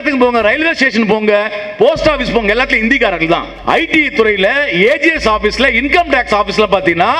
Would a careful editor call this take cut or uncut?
cut